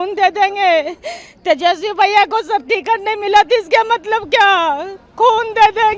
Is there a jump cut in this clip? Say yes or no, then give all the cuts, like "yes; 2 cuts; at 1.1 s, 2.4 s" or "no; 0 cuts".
no; 0 cuts